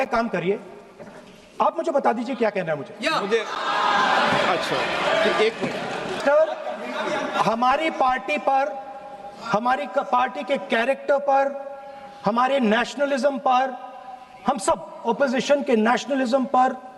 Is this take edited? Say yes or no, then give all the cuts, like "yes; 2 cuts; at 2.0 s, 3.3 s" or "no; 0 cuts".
yes; 1 cut; at 6.2 s